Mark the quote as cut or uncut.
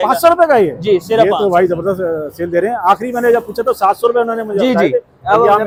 uncut